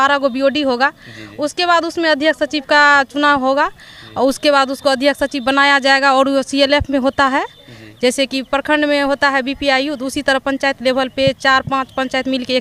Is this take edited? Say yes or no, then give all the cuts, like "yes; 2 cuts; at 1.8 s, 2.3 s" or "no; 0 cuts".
no; 0 cuts